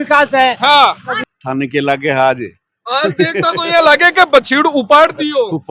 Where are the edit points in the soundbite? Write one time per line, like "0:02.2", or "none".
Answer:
0:01.2